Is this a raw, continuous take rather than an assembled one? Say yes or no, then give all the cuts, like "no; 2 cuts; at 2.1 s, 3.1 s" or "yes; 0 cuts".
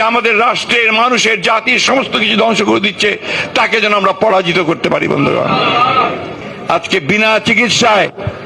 no; 1 cut; at 6.5 s